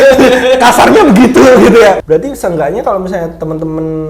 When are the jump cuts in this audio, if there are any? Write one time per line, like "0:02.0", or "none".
0:02.0